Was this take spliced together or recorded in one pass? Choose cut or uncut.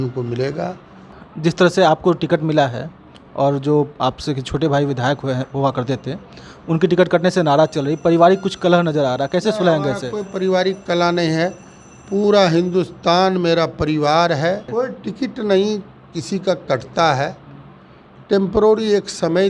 cut